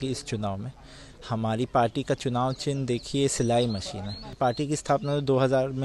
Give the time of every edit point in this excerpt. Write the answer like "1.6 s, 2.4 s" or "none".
4.4 s